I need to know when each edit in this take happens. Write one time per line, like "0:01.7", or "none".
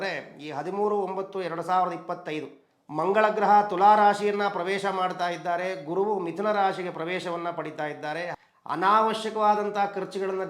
0:08.3